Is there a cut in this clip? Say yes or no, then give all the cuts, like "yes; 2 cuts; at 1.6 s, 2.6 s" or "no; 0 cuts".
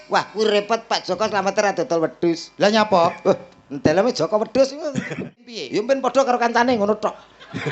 yes; 1 cut; at 5.6 s